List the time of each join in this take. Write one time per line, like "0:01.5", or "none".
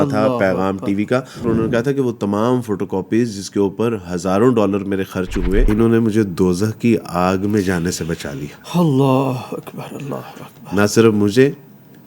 0:01.4
0:05.7